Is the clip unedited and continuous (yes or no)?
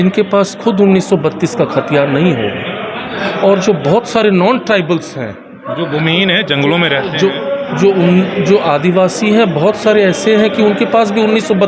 yes